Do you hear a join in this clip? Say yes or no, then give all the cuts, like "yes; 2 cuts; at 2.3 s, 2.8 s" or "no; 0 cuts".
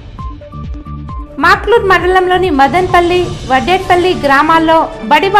yes; 1 cut; at 1.2 s